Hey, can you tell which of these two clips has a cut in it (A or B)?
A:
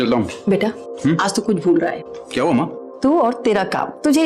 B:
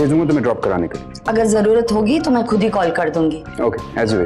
B